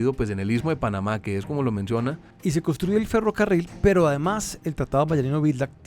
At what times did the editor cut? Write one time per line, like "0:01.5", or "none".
0:02.3